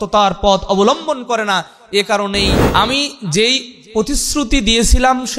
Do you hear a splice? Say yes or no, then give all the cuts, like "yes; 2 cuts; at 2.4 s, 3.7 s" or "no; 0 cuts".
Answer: yes; 1 cut; at 2.6 s